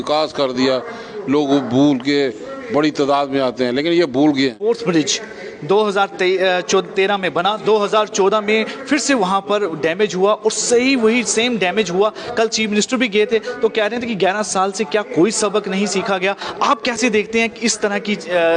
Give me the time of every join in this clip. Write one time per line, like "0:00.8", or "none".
0:04.7